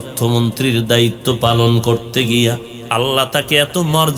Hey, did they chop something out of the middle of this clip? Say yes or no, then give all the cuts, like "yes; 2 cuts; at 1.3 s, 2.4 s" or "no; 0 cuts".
yes; 1 cut; at 2.7 s